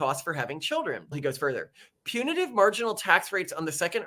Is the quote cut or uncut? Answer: cut